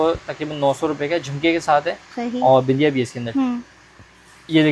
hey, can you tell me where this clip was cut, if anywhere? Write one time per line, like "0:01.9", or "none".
none